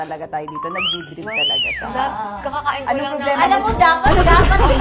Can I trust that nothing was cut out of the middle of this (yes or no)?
yes